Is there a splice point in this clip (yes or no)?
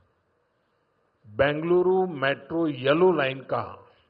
no